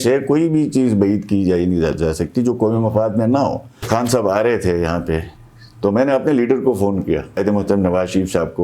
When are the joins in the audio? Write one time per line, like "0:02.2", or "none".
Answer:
0:03.8
0:07.4